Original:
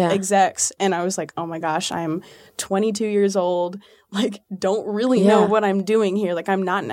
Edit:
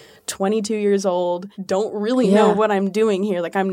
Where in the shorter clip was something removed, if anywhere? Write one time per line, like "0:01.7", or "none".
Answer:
0:01.5

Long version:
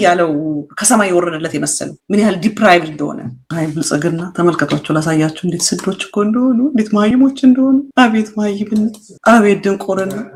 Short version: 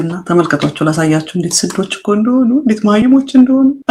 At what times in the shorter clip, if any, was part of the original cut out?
none

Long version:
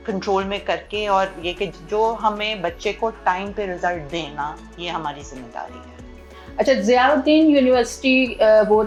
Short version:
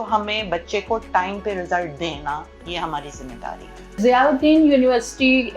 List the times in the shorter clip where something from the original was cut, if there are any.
0:04.0

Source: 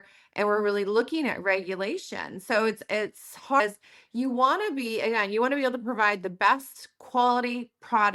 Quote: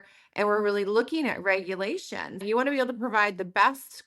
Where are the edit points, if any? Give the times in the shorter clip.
0:02.4

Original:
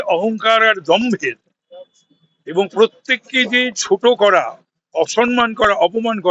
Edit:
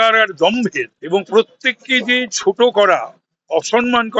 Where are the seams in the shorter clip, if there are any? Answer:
0:00.9

